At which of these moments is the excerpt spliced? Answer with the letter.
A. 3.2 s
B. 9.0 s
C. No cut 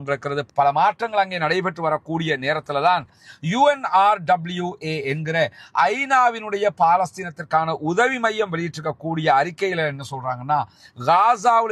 A